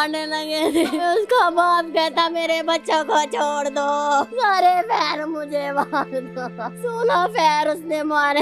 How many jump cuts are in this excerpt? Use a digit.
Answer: 3